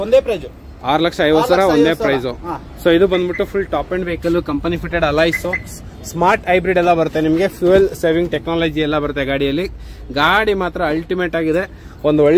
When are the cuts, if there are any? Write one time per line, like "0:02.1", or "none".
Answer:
none